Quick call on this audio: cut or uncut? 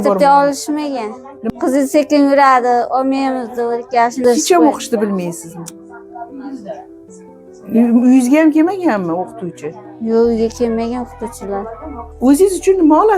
cut